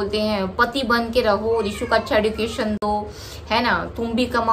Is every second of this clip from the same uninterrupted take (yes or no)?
yes